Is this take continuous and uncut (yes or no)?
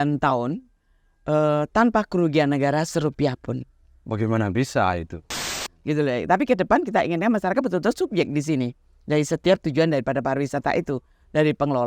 no